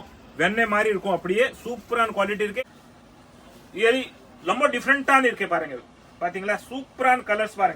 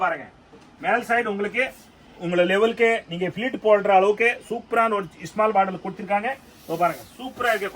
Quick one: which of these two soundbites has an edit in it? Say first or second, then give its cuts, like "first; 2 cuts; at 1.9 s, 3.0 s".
first; 1 cut; at 2.6 s